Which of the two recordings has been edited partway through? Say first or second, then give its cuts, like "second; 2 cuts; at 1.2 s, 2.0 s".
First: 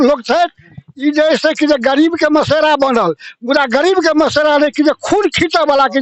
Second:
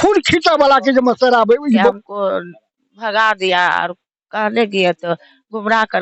second; 1 cut; at 2.0 s